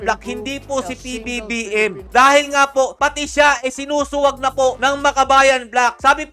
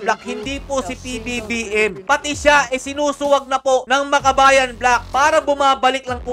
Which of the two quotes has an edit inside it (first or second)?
second